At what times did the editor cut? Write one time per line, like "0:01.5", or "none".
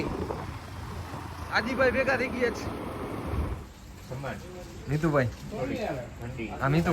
0:03.6